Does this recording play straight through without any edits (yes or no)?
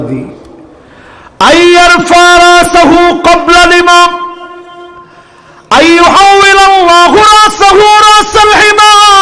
yes